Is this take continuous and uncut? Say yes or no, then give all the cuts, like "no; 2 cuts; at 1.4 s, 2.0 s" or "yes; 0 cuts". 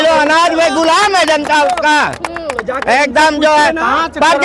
yes; 0 cuts